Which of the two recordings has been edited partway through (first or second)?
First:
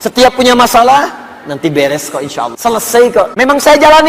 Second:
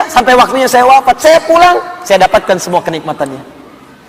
first